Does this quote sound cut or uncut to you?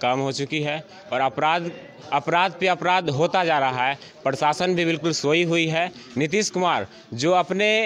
uncut